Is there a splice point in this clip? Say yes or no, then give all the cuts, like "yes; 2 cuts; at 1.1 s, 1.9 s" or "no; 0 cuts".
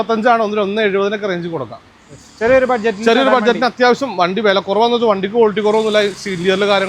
no; 0 cuts